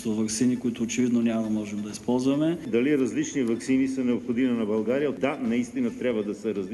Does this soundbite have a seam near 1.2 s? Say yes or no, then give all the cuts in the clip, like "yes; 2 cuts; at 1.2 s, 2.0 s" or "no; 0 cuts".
no; 2 cuts; at 2.6 s, 5.1 s